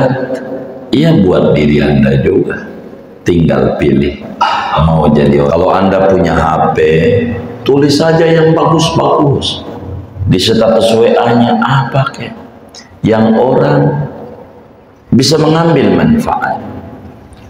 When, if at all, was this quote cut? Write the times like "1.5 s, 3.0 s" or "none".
5.5 s